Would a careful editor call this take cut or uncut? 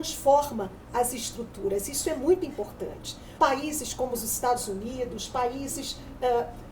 cut